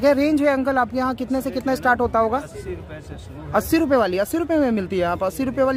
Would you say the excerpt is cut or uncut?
uncut